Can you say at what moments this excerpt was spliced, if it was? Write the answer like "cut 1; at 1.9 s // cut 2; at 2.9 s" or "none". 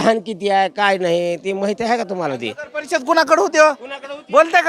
none